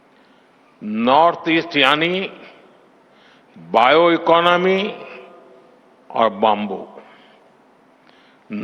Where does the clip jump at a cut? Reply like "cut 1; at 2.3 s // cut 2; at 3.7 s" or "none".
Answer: none